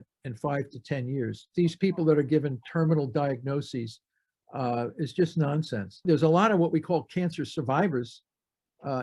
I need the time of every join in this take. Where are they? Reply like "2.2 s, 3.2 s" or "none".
1.5 s, 6.0 s